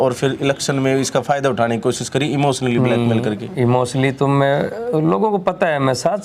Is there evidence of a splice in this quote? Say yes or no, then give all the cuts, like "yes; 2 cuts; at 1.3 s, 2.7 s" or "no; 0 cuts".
no; 0 cuts